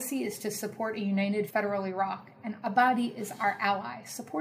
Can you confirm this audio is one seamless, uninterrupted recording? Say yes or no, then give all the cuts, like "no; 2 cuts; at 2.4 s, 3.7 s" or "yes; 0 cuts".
no; 1 cut; at 1.5 s